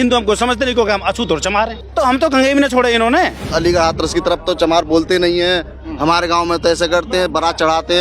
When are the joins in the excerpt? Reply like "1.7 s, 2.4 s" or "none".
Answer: 1.8 s, 3.4 s